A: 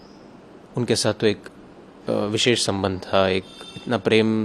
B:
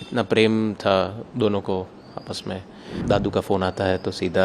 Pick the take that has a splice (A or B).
B